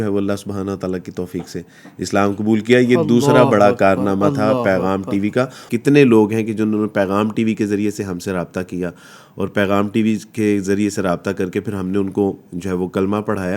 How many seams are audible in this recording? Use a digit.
0